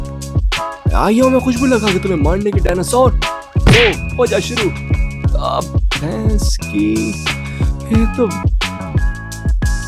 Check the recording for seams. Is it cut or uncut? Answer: uncut